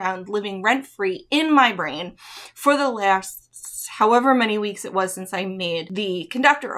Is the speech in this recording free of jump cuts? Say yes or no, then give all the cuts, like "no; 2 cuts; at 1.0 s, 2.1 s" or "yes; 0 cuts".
no; 1 cut; at 5.9 s